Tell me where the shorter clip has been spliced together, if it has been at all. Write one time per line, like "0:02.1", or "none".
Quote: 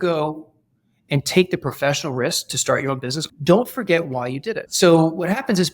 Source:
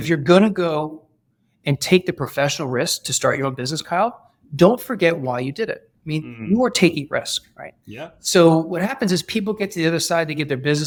0:03.2
0:04.6